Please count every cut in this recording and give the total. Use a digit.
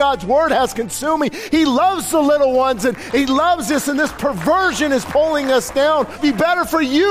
1